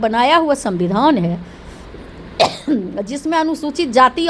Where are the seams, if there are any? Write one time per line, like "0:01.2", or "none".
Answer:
none